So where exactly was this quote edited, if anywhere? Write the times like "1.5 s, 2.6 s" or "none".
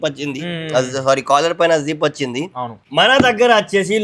2.8 s